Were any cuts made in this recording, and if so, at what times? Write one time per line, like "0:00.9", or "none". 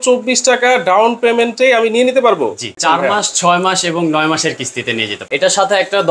0:02.7
0:05.2